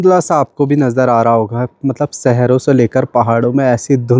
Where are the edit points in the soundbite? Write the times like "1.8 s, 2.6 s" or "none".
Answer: none